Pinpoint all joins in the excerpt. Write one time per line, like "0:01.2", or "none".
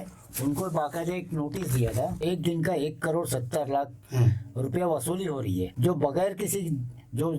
0:02.2
0:05.7